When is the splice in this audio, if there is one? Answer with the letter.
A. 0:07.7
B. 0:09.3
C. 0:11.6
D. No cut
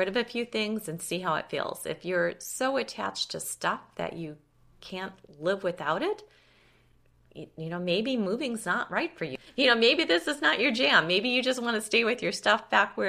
B